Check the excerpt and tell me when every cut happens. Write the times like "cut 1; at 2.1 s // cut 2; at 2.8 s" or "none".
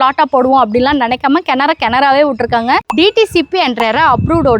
cut 1; at 2.8 s